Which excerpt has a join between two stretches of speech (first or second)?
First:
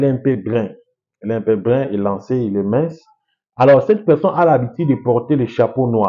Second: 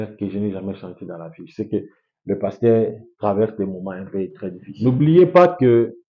second